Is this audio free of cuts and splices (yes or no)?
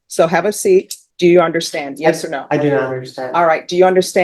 no